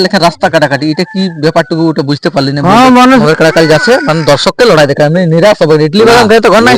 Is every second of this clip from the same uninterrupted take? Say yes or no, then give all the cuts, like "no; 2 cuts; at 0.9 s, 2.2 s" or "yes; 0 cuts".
no; 1 cut; at 3.2 s